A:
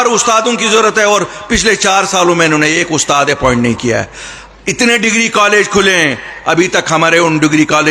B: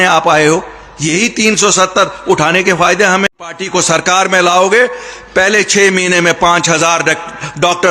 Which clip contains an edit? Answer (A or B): B